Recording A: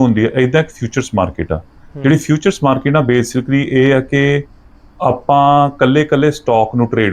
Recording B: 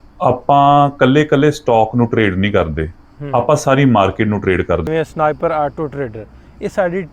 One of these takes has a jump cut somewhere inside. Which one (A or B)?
B